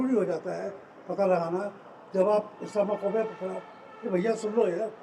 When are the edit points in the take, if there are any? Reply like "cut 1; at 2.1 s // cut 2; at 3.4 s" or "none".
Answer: none